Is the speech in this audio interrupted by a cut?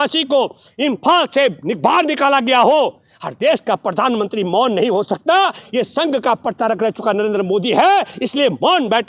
no; 0 cuts

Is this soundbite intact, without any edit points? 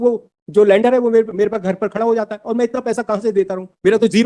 yes; 0 cuts

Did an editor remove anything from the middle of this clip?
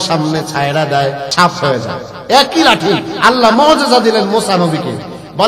yes; 1 cut; at 1.2 s

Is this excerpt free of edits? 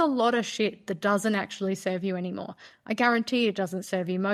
yes; 0 cuts

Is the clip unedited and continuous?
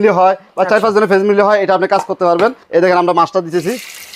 no; 1 cut; at 2.6 s

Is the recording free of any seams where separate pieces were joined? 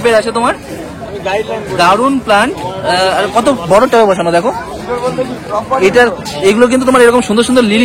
yes; 0 cuts

